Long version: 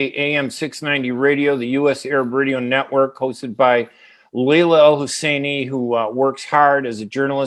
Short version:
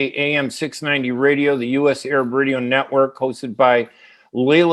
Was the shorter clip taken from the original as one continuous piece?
yes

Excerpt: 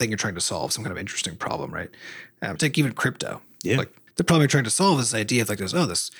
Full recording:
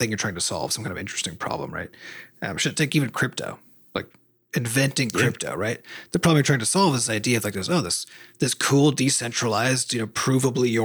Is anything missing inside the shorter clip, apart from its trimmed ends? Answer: yes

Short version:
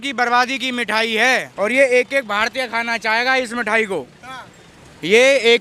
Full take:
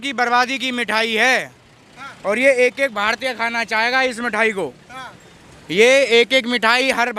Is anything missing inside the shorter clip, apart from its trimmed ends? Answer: yes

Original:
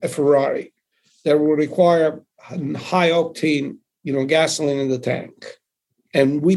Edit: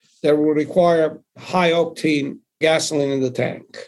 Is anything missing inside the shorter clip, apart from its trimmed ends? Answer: yes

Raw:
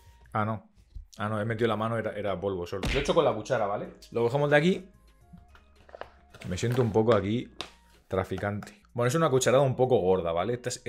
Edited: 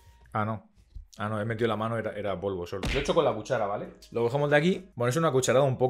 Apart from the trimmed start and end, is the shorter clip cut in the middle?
yes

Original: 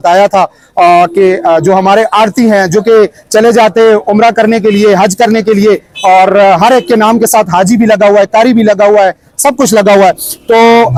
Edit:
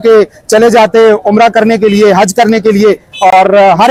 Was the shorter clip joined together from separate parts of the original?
no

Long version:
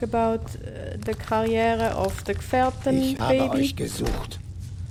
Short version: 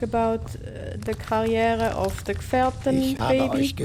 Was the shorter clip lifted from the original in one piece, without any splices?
yes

